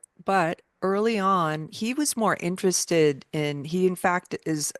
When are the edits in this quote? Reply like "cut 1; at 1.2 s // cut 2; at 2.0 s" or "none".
none